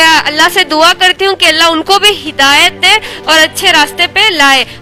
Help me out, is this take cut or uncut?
uncut